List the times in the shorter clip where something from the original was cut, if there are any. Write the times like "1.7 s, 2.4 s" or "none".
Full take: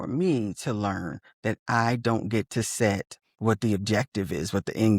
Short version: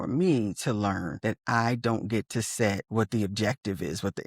1.1 s, 2.8 s